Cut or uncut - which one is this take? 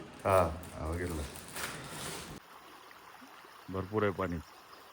cut